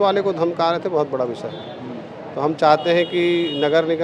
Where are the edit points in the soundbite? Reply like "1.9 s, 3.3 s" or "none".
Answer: none